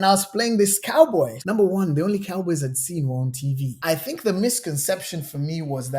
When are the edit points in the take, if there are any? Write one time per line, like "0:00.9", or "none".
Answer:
0:01.4
0:03.7

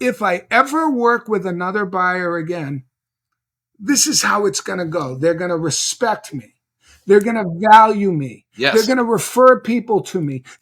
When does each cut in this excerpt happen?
none

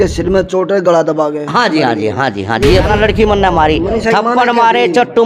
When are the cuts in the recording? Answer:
0:02.9

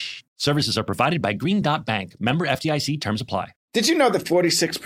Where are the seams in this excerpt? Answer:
0:03.6

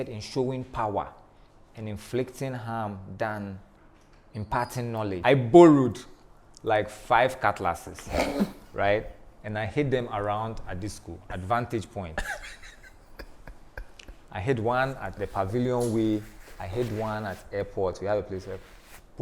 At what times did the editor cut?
0:05.2

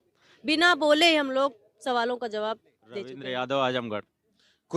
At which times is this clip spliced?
0:03.1

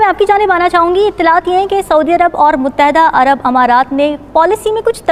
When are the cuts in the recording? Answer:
none

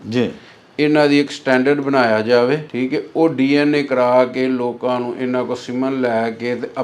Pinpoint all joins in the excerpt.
0:02.7

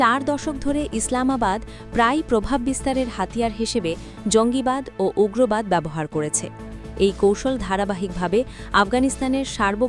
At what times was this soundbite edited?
none

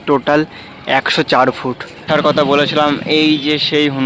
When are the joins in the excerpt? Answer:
0:02.0

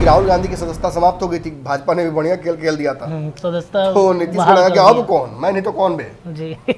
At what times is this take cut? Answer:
none

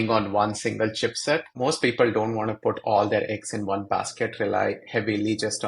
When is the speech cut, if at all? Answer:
0:01.5

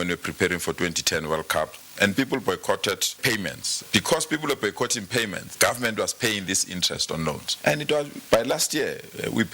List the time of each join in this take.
0:03.2

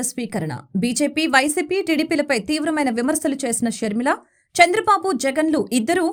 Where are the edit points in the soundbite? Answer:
none

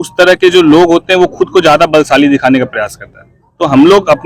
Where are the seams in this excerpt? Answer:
none

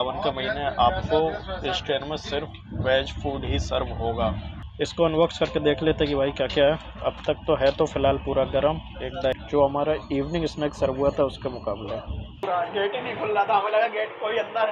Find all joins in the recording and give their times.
0:04.9
0:09.4
0:12.4

